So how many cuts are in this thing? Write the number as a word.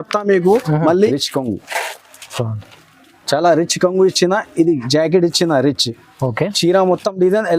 one